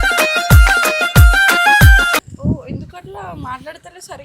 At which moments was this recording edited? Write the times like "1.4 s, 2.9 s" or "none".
2.2 s